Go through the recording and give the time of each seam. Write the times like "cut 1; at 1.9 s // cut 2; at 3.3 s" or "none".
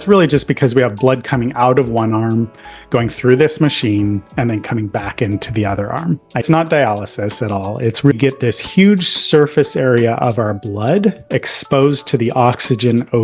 cut 1; at 6.4 s // cut 2; at 8.1 s

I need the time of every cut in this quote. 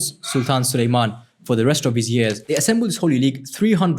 cut 1; at 2.4 s

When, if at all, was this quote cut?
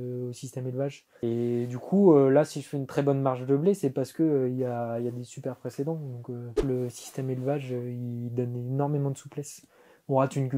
cut 1; at 1.1 s // cut 2; at 6.6 s

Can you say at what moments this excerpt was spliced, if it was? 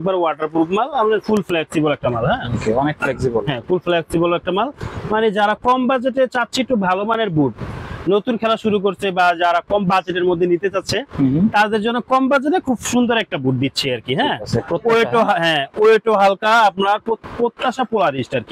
none

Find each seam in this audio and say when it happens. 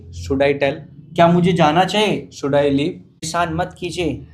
cut 1; at 3.3 s

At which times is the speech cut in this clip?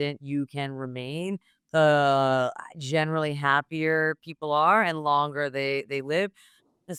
none

